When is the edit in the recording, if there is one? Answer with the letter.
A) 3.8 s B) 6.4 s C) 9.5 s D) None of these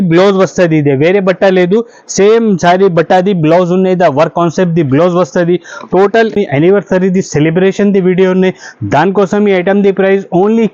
B